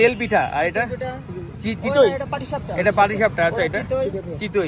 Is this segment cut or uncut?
uncut